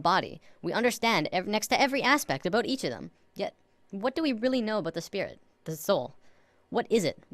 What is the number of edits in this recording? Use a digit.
1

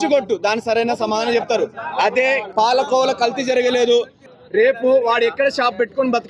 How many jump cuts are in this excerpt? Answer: 2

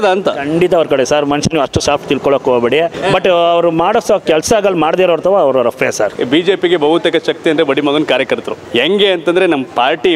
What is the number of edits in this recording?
3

